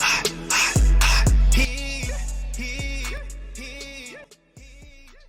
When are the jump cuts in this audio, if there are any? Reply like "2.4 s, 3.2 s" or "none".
none